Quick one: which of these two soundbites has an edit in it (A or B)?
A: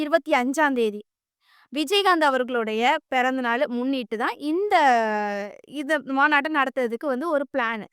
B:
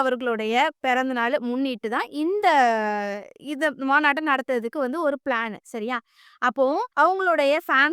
B